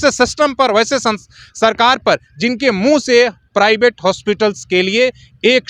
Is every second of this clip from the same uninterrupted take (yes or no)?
yes